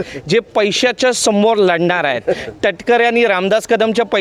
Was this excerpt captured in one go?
yes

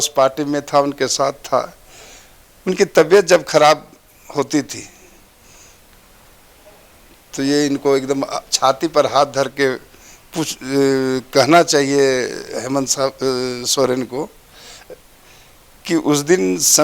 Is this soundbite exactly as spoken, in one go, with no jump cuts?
yes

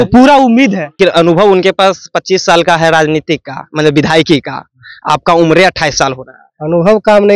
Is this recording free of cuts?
no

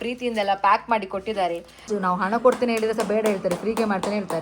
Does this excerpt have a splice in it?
yes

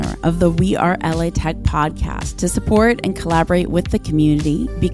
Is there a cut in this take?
no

